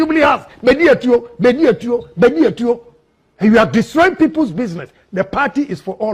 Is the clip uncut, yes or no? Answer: yes